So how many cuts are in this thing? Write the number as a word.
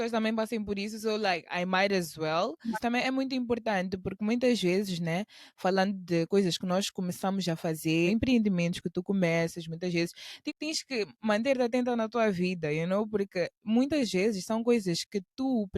three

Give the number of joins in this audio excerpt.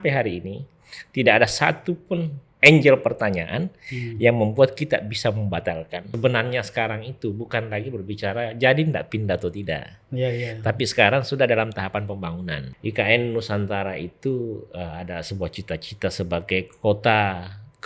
two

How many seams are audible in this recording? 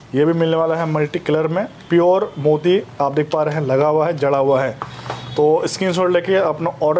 zero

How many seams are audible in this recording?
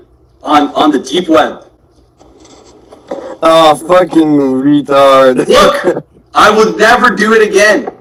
zero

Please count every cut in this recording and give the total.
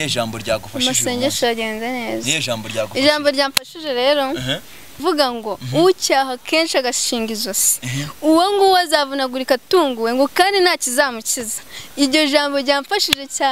one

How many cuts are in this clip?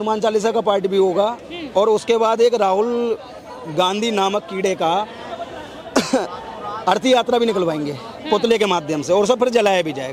zero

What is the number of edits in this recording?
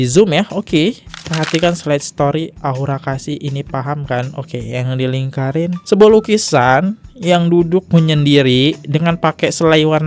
one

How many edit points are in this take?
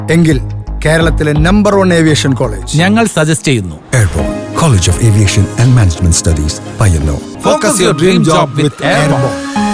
one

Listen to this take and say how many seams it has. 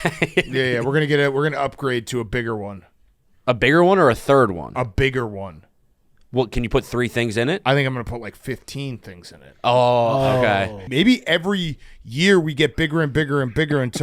one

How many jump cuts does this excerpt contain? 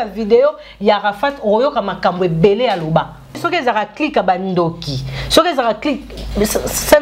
one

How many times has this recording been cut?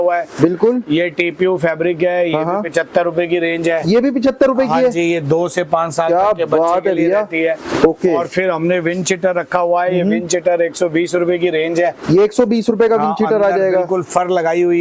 zero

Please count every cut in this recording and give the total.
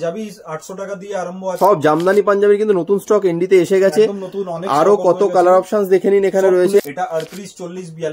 two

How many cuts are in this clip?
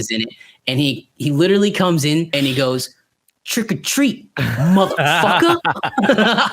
one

